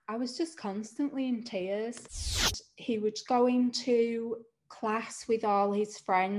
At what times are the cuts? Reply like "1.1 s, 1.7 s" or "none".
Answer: 2.5 s